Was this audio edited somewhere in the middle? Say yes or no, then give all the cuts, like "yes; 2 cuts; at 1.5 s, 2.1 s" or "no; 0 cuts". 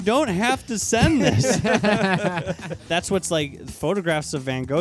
yes; 1 cut; at 2.8 s